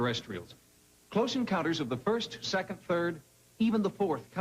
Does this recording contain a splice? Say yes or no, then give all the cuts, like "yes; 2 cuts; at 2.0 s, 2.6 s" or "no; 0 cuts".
no; 0 cuts